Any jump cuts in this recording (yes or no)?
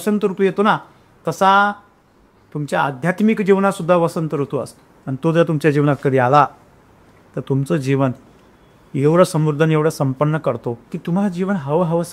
yes